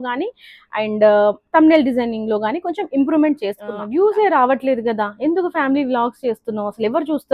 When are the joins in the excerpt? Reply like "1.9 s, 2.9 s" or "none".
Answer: 3.7 s